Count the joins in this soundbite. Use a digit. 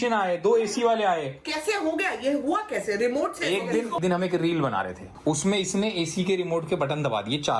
2